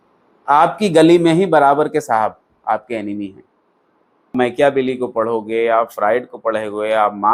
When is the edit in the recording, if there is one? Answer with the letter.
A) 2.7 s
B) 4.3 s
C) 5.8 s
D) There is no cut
B